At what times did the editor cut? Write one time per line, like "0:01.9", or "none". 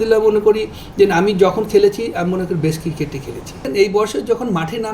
0:03.6

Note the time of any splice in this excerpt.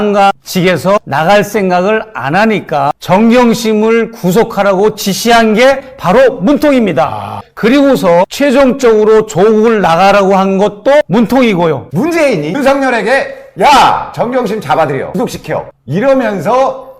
0:03.0
0:11.0
0:11.9
0:15.1

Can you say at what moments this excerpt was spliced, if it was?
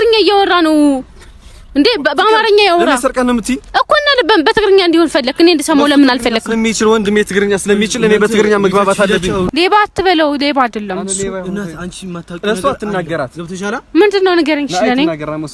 0:09.5

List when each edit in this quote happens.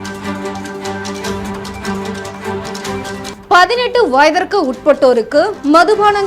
0:03.3

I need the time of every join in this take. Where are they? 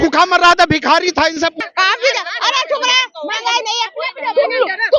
0:01.5

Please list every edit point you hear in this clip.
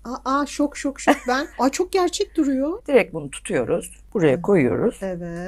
0:01.5
0:02.8
0:04.0

